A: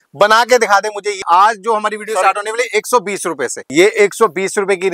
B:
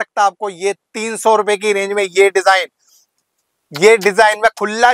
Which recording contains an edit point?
A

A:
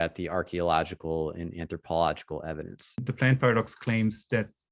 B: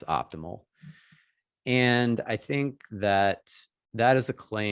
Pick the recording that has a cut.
A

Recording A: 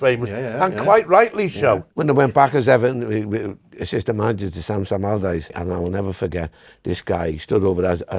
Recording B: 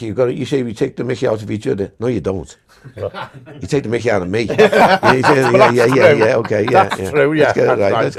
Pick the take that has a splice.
A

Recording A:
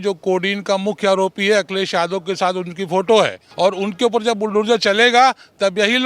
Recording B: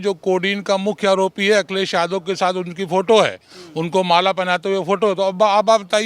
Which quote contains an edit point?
A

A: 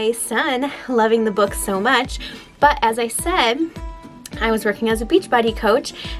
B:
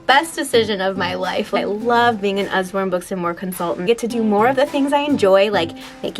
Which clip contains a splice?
B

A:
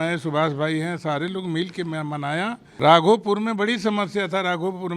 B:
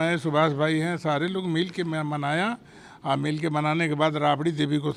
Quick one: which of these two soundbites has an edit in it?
A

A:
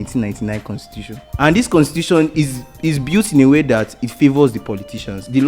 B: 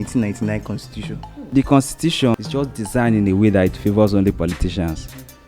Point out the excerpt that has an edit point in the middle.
B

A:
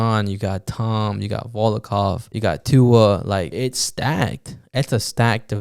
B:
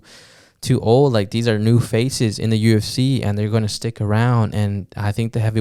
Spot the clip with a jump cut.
A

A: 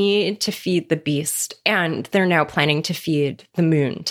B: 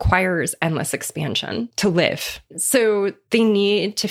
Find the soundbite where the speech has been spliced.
B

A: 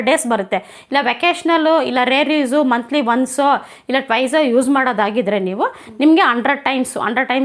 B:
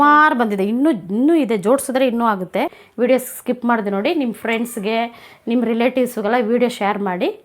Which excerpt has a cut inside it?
B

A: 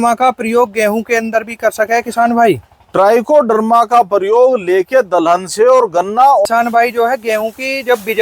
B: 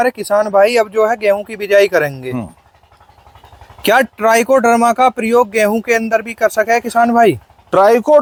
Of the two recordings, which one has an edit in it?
A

